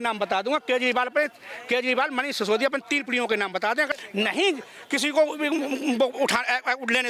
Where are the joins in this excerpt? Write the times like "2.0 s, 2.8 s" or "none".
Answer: none